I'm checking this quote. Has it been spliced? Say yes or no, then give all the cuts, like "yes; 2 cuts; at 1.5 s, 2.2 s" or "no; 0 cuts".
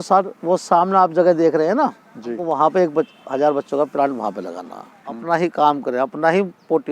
yes; 2 cuts; at 2.4 s, 5.2 s